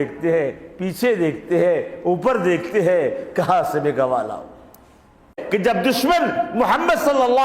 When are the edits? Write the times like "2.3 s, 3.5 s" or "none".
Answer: 5.4 s

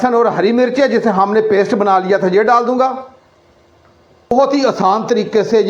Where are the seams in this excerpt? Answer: 4.3 s

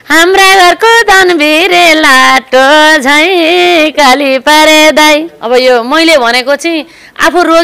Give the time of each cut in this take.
5.3 s

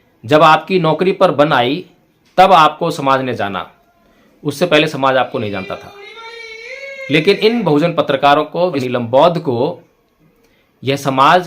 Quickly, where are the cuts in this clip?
8.8 s

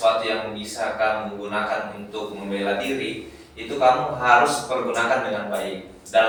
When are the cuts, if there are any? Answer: none

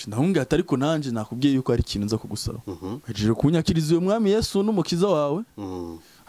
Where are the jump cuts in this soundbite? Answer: 3.1 s

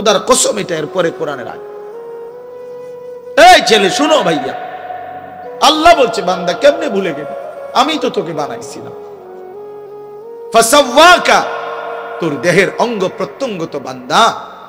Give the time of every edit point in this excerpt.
1.5 s, 3.4 s, 8.8 s, 10.6 s

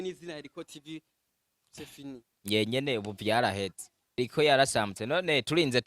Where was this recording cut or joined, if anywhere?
4.2 s

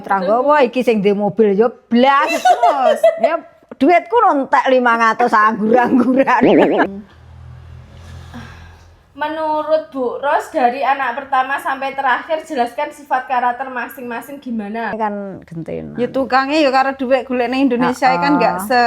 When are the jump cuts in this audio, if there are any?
6.9 s, 15.0 s

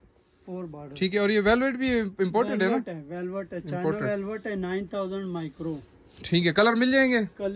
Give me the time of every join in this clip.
none

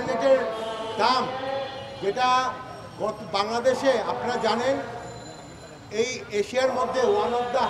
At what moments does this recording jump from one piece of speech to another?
none

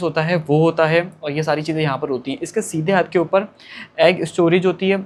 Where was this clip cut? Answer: none

